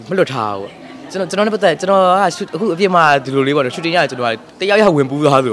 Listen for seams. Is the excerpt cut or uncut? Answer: uncut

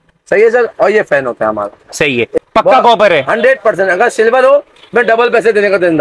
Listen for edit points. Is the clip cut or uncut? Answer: cut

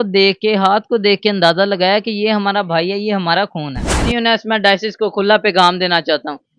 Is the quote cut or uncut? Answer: cut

